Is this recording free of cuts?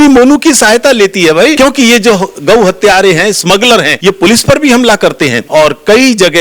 no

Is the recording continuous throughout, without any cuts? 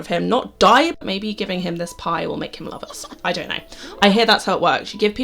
no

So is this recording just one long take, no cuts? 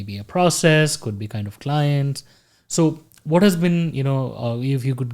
yes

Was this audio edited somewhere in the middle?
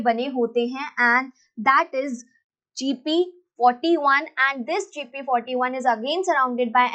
no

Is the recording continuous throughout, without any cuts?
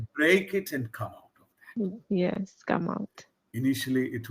yes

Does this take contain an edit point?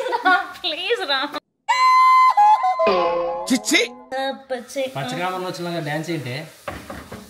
yes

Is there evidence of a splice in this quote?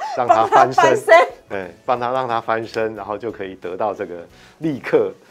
no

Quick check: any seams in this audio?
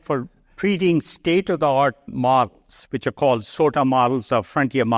yes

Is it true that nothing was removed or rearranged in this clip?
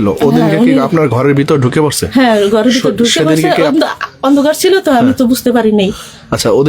yes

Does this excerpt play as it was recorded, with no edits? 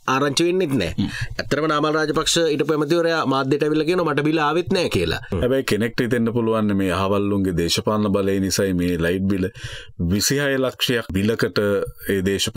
no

